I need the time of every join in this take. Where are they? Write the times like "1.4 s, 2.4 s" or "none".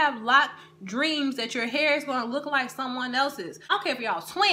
3.6 s